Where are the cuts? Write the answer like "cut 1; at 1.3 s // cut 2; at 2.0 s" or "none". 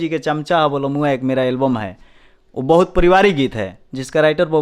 none